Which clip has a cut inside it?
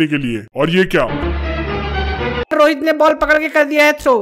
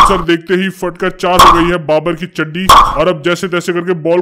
first; 1 cut; at 2.5 s

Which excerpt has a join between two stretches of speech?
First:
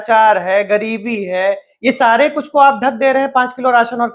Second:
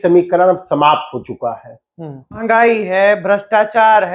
second; 1 cut; at 2.4 s

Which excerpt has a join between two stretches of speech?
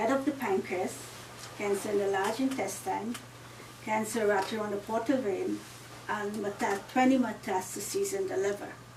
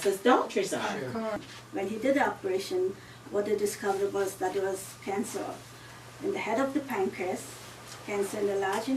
second; 1 cut; at 1.4 s

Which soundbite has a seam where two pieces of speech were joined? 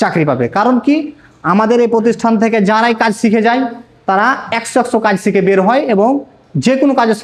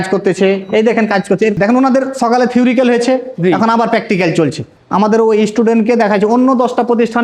second; 2 cuts; at 1.5 s, 4.8 s

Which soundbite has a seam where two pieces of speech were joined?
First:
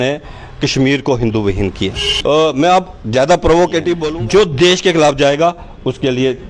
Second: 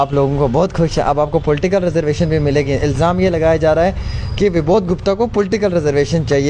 first; 2 cuts; at 2.1 s, 4.0 s

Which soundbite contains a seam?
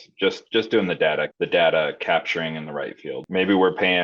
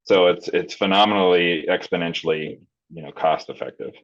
first; 2 cuts; at 1.3 s, 3.2 s

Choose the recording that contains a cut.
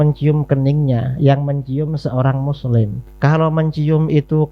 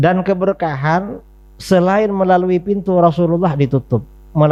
first; 1 cut; at 3.0 s

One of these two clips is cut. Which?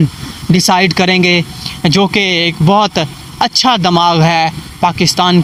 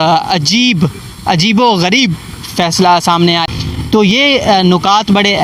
second; 1 cut; at 3.4 s

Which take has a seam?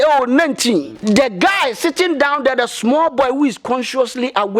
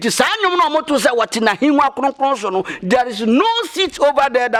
first; 1 cut; at 0.9 s

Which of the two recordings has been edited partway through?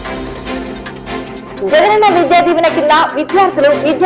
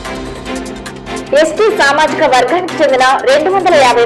first; 1 cut; at 1.3 s

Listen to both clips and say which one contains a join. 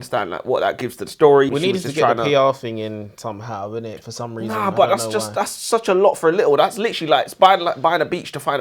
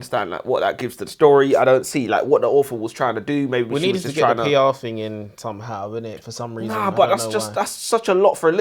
first; 1 cut; at 1.5 s

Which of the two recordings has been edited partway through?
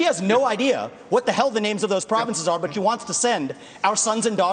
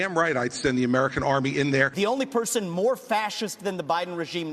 second; 1 cut; at 1.9 s

